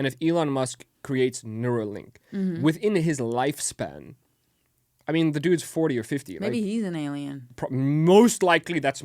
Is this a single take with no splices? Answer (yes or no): yes